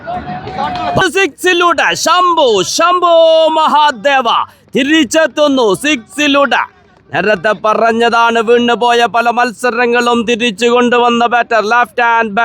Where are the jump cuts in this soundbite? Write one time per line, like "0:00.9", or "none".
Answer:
0:01.0